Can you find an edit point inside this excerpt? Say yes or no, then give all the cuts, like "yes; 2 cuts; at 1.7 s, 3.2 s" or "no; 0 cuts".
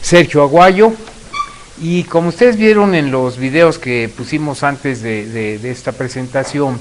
no; 0 cuts